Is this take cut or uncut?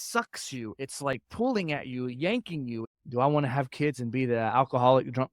cut